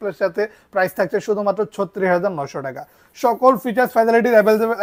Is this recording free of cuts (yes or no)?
yes